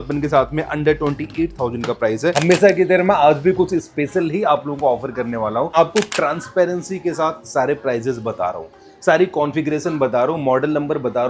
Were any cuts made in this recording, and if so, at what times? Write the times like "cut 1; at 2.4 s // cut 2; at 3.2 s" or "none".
cut 1; at 2.4 s // cut 2; at 5.7 s